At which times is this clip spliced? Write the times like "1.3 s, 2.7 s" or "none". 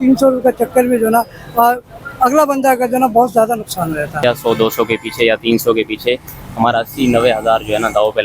4.2 s